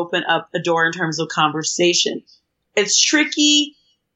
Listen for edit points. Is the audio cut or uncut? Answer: uncut